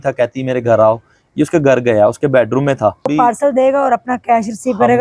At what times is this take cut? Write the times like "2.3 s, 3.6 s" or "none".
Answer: 3.1 s